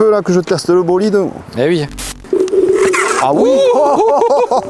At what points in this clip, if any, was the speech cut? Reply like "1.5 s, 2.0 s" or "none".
2.0 s